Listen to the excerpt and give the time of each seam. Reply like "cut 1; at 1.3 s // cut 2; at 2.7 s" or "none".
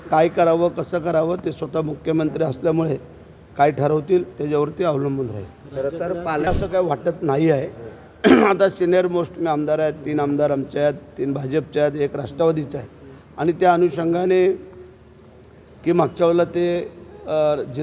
cut 1; at 6.5 s